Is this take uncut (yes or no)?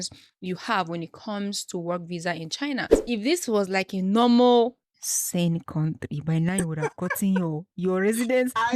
no